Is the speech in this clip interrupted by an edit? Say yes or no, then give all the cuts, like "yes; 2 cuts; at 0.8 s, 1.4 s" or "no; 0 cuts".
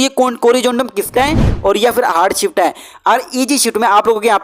yes; 1 cut; at 1.1 s